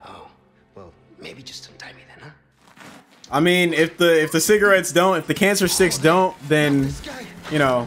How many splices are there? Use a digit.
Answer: 0